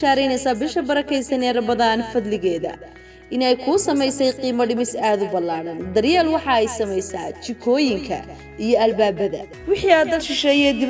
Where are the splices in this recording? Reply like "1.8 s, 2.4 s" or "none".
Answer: 9.5 s